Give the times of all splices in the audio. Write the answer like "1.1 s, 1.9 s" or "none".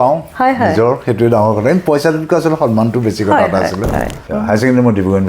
4.2 s